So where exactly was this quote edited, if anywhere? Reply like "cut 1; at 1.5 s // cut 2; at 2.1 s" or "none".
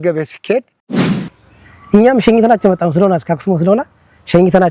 cut 1; at 1.2 s